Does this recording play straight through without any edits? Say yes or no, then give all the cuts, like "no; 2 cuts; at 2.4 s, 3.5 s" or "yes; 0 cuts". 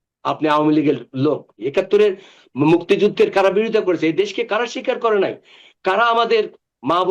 no; 1 cut; at 1.6 s